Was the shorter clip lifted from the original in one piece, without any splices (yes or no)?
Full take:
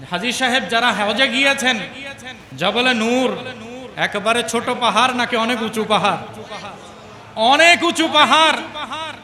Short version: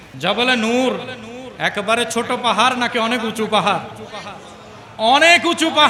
yes